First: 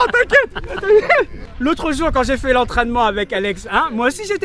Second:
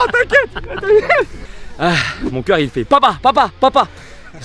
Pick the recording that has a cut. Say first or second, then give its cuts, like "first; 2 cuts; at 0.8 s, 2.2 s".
second; 1 cut; at 1.4 s